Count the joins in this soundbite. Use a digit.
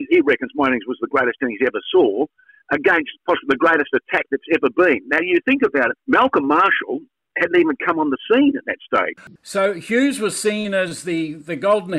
2